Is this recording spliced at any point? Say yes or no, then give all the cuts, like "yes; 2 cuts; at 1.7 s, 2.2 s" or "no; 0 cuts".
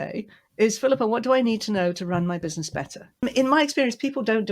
yes; 1 cut; at 3.2 s